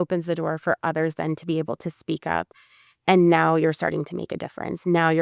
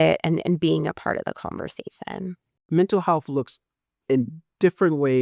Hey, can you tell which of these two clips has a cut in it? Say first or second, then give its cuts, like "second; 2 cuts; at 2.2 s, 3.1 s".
second; 1 cut; at 2.6 s